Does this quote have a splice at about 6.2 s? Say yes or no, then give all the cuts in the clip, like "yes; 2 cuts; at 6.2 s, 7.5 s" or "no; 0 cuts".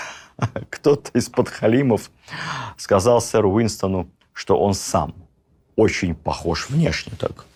no; 0 cuts